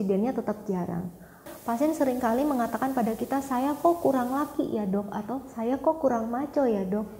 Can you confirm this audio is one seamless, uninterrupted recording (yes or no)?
no